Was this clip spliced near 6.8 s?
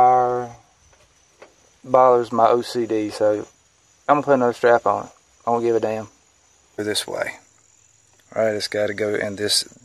yes; 1 cut; at 6.8 s

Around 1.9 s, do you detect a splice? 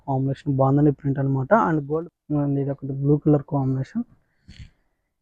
yes; 1 cut; at 1.9 s

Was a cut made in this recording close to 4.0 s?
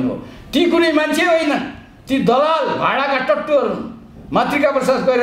no; 0 cuts

